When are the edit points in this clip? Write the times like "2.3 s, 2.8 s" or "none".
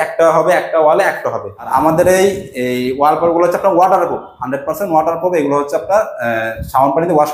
1.7 s